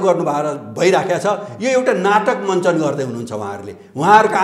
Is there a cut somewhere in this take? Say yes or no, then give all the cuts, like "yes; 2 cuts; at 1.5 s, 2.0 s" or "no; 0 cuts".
no; 0 cuts